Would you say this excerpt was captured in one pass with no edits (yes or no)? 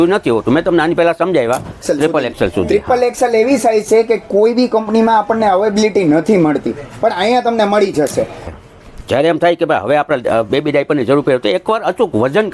no